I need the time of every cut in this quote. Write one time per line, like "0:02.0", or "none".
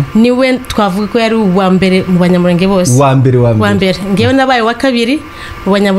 none